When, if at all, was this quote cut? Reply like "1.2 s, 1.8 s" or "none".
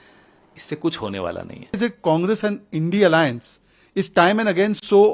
1.8 s